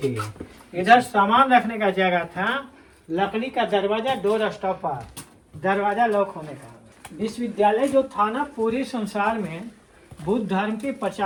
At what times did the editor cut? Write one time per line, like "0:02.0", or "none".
none